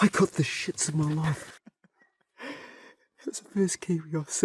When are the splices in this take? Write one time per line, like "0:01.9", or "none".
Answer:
0:01.5